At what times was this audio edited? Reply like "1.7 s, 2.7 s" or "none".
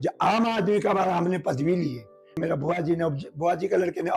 2.4 s

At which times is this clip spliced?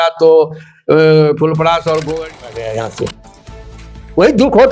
2.6 s

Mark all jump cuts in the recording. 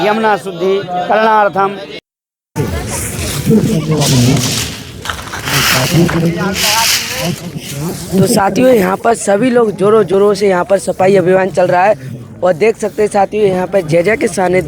1.9 s

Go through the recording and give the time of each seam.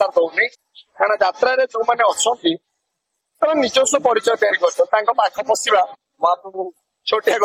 none

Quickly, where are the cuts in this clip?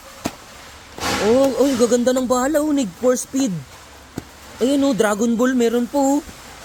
none

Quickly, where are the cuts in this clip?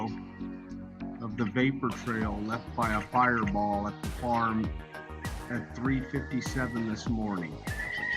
1.5 s

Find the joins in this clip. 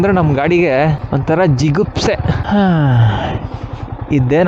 1.0 s, 2.4 s

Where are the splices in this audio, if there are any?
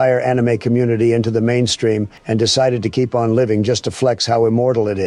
2.2 s

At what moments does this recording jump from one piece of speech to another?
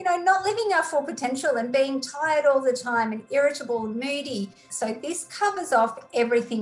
4.7 s

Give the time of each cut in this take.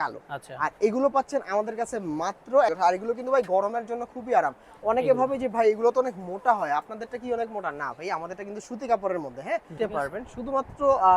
2.7 s, 9.8 s

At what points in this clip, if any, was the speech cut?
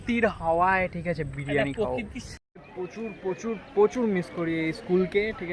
2.4 s

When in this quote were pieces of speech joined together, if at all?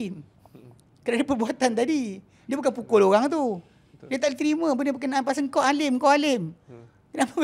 none

